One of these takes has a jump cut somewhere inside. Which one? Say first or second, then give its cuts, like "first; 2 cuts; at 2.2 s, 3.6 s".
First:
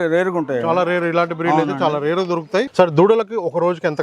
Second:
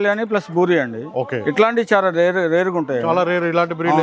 first; 1 cut; at 2.7 s